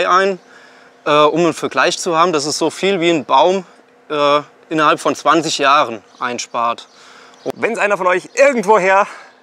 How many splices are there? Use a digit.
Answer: 1